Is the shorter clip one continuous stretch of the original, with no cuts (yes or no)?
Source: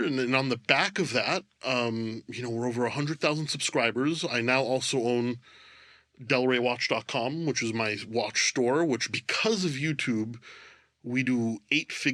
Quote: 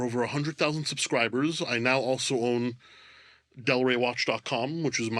yes